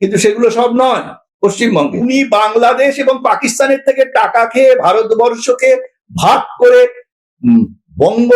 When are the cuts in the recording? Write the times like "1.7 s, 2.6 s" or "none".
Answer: 2.0 s